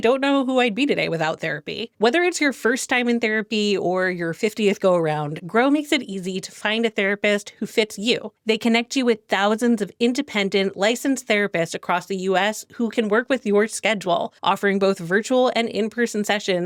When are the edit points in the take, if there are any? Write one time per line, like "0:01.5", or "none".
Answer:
none